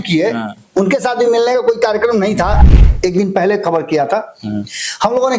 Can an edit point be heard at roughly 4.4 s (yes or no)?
no